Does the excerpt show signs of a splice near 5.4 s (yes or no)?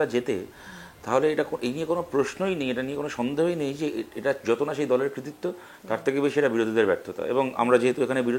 no